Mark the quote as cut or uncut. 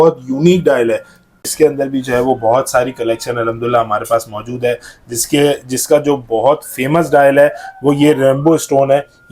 cut